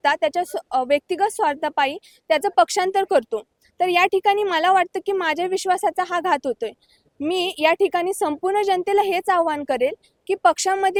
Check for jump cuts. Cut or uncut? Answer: uncut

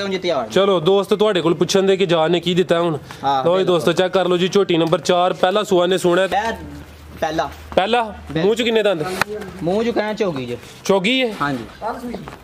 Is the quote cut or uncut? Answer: cut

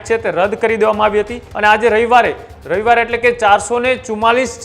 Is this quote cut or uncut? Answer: cut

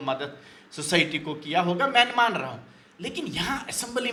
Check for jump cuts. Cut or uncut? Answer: uncut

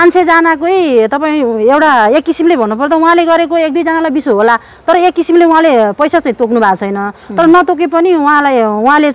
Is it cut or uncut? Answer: uncut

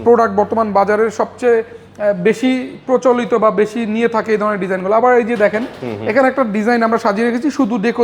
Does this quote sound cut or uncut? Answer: uncut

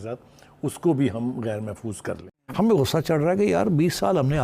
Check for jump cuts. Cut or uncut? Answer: cut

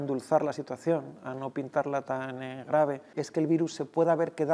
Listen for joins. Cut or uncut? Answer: cut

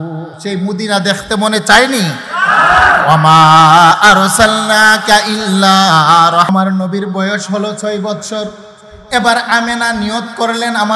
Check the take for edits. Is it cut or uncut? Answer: cut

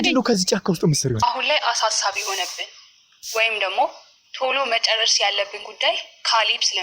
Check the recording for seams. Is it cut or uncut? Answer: cut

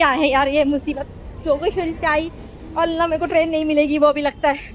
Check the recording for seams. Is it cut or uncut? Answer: uncut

